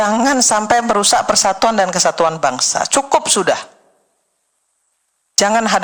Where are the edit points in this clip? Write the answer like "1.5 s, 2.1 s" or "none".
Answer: none